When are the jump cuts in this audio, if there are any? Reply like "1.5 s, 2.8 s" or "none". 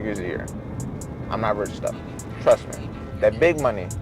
3.0 s